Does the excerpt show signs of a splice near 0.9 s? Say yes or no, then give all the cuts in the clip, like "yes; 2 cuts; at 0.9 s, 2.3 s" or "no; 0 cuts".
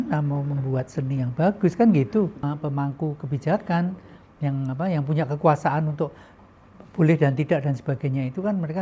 no; 1 cut; at 2.4 s